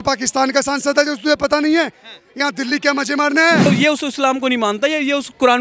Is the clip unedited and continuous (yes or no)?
no